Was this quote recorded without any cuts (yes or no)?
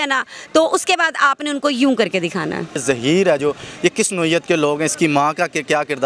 no